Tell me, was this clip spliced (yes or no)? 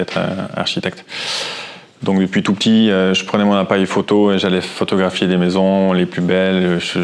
no